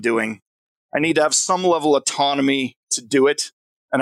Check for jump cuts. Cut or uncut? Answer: uncut